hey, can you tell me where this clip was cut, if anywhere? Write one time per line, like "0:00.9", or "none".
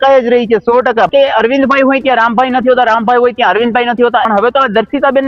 0:01.1
0:04.3